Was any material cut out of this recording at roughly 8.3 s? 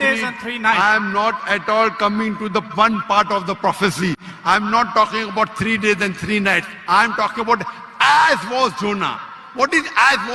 no; 0 cuts

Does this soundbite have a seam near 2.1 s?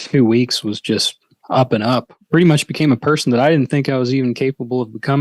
yes; 1 cut; at 2.1 s

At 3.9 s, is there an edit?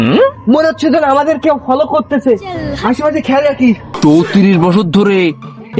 yes; 1 cut; at 3.9 s

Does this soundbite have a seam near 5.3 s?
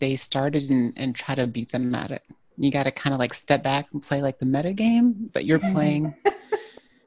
yes; 1 cut; at 5.3 s

